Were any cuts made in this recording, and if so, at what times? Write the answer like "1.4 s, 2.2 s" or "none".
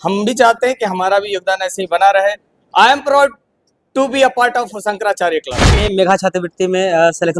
5.7 s